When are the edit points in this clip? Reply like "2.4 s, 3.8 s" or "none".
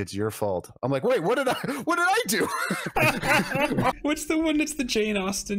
4.0 s

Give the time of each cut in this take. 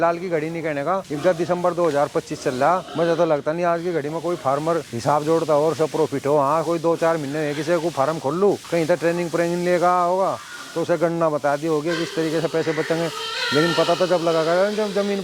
none

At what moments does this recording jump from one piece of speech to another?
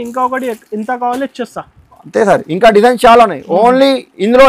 none

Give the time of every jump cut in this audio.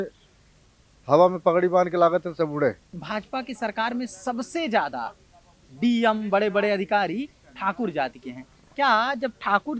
2.9 s

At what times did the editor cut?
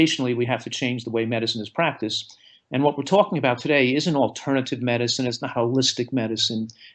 none

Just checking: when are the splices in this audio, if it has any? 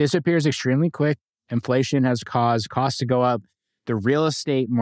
1.2 s

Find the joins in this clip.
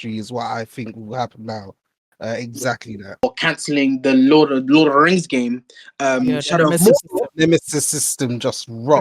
3.2 s

